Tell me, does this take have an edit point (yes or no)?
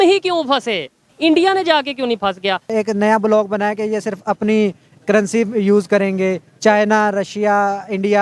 yes